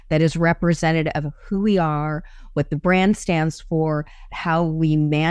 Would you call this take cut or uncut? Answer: uncut